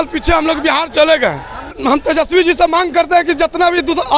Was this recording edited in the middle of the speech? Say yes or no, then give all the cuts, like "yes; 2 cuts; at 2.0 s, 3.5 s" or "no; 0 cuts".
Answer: yes; 1 cut; at 1.8 s